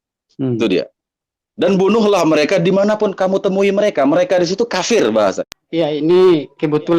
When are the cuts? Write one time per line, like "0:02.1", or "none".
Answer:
0:05.5